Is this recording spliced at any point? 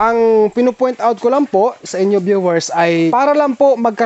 yes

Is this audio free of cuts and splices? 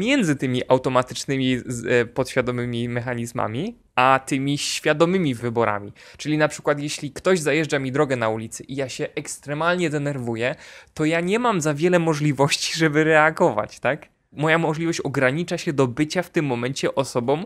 yes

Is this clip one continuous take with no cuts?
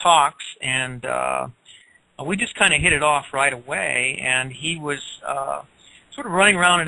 no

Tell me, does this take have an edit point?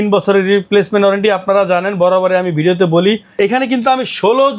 yes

